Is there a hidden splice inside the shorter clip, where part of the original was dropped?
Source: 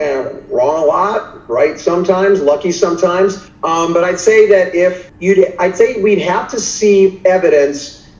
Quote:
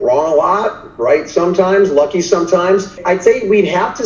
yes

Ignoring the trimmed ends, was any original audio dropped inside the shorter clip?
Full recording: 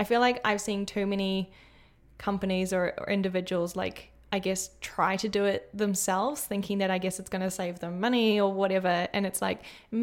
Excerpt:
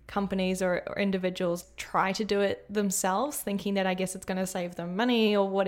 yes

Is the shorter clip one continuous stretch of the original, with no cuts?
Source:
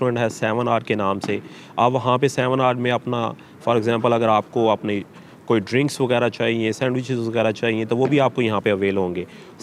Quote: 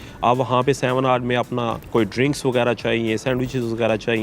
no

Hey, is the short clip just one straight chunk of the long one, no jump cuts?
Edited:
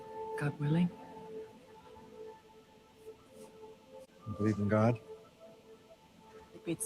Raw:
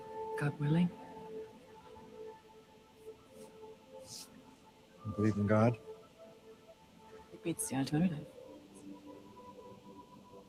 no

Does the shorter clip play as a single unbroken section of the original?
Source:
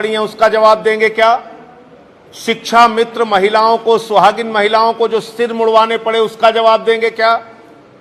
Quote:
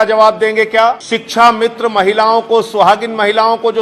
no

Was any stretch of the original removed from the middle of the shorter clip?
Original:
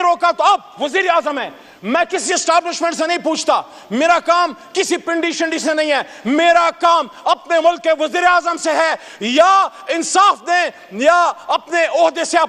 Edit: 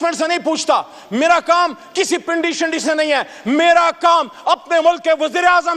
no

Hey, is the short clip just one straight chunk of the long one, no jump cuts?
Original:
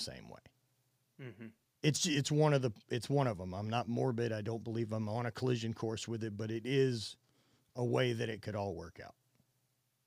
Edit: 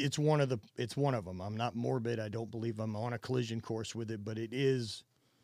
yes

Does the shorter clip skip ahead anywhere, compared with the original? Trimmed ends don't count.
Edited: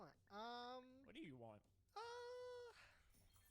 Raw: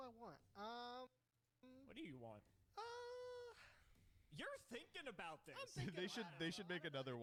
yes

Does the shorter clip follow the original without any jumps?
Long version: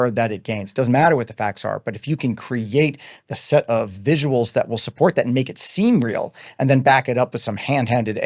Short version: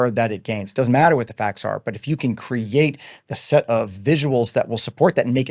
yes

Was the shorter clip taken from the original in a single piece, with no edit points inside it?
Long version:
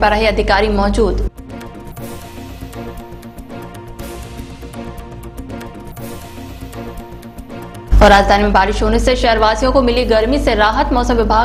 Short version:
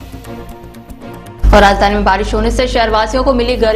no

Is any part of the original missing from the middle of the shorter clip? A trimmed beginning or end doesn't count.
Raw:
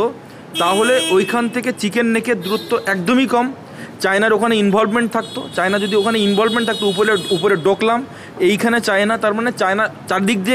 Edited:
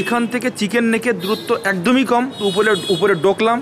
yes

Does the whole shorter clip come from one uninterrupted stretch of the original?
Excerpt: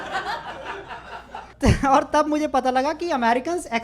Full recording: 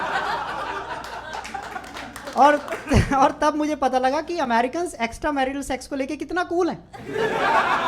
no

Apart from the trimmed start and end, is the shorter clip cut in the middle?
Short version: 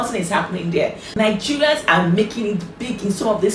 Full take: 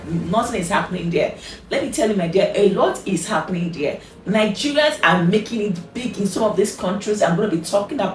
yes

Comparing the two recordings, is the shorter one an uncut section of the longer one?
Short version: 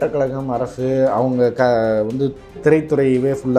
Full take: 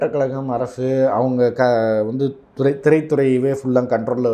no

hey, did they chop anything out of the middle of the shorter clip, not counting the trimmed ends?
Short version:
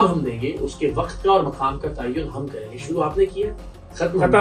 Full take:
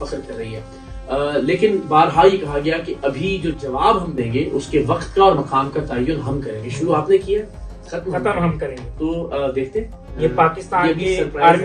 no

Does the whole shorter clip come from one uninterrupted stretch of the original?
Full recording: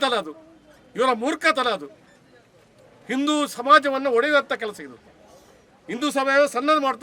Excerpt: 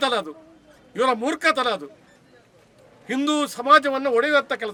yes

